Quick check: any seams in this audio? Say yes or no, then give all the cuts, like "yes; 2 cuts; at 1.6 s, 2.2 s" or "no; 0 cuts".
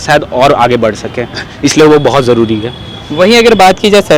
no; 0 cuts